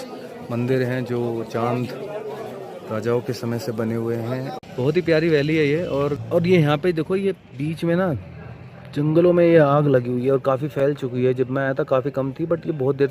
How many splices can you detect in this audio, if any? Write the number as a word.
two